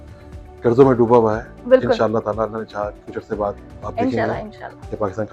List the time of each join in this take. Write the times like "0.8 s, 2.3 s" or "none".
none